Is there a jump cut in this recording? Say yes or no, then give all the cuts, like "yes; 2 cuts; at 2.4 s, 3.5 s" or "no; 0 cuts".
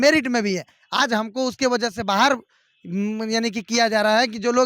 no; 0 cuts